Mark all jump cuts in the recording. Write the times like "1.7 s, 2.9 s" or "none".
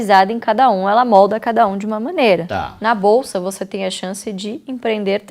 2.5 s